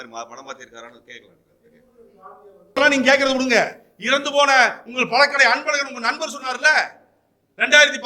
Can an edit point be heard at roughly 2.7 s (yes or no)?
yes